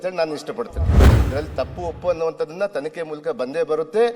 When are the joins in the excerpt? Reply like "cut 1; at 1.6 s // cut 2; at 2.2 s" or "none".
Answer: cut 1; at 1.2 s